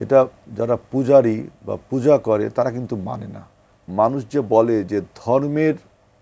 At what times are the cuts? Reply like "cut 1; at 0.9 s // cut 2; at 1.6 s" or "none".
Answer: cut 1; at 3.8 s